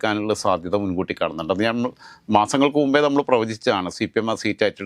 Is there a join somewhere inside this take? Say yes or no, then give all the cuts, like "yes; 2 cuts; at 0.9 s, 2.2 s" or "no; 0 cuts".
no; 0 cuts